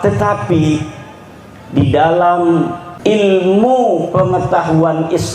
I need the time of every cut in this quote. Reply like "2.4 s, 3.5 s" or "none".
2.8 s